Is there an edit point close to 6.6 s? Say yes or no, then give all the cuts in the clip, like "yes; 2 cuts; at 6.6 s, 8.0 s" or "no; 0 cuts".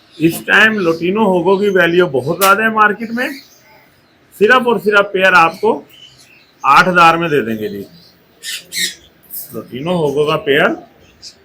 no; 0 cuts